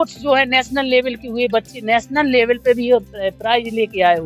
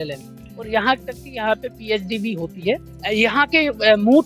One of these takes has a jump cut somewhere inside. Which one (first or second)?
second